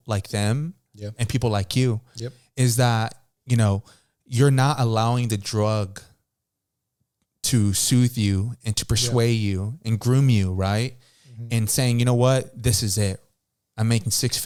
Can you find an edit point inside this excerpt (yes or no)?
no